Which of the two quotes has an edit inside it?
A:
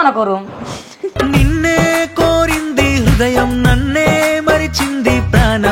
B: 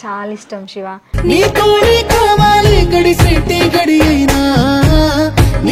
B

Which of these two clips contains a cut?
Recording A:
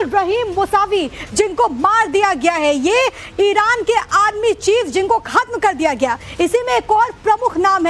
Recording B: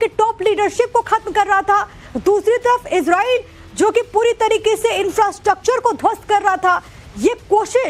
A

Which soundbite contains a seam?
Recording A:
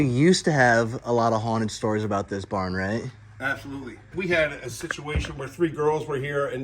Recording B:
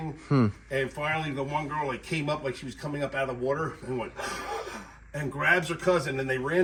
A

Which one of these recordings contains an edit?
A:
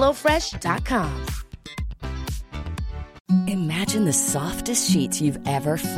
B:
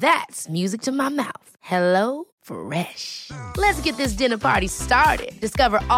A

